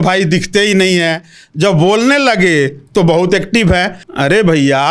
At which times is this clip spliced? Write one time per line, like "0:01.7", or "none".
0:04.0